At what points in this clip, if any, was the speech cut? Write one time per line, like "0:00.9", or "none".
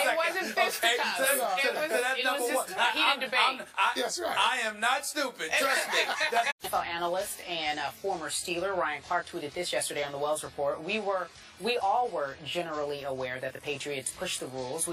none